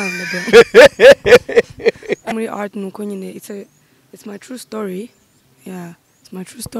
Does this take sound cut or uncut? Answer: cut